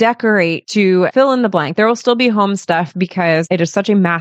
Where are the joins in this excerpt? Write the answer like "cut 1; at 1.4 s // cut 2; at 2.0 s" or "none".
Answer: cut 1; at 1.0 s // cut 2; at 3.5 s